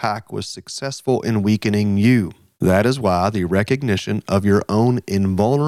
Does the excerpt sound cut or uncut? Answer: cut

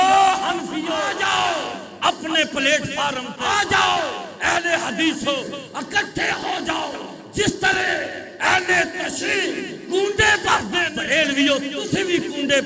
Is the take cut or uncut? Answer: cut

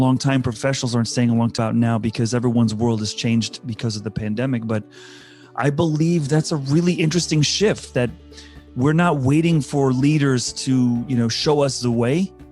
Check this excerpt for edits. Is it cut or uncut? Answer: cut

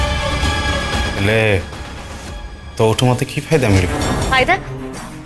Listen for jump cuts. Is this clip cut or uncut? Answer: cut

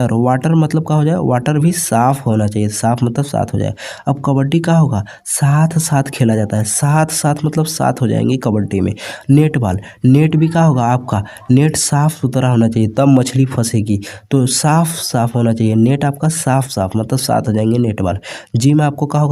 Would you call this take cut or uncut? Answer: uncut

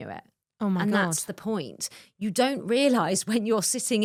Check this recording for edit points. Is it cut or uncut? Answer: uncut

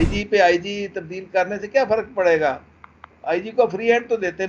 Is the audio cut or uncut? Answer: uncut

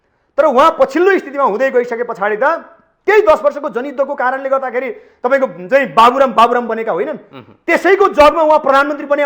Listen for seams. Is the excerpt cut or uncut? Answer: uncut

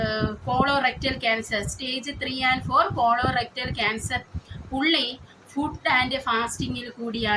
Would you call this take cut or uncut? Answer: uncut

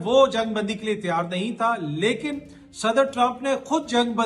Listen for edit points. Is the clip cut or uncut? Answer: uncut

